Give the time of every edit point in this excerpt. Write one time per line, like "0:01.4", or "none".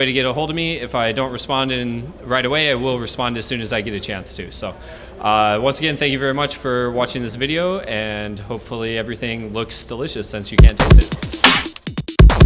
0:10.5